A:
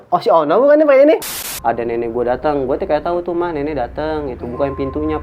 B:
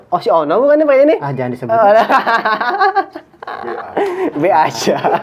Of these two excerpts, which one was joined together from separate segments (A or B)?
A